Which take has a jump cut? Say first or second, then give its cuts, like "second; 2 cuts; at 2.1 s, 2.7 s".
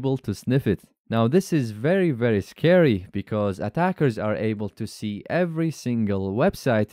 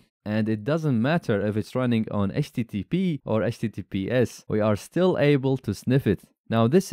second; 2 cuts; at 3.2 s, 4.4 s